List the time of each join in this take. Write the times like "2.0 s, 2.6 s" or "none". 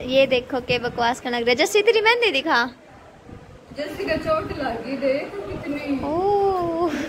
none